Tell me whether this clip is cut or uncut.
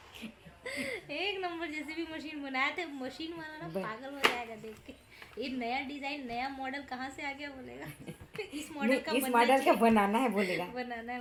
uncut